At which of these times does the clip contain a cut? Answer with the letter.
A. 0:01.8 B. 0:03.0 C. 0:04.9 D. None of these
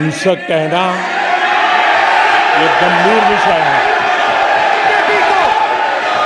D